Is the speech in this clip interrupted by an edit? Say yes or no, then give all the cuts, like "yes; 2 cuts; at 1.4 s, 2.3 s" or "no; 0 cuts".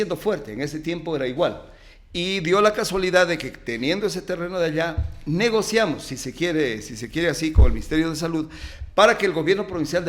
no; 0 cuts